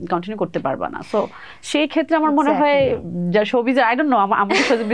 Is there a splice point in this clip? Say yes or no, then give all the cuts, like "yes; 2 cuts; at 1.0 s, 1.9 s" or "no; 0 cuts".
no; 0 cuts